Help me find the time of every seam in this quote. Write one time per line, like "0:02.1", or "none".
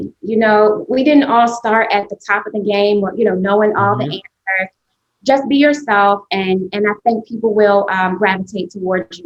none